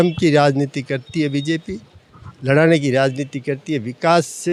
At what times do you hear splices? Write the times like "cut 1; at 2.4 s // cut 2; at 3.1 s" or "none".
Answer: none